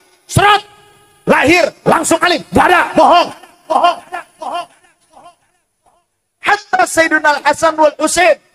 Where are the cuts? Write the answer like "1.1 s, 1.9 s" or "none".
none